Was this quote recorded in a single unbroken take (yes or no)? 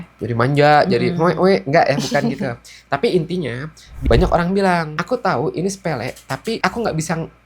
no